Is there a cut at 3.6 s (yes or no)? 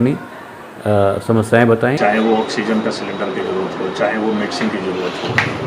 no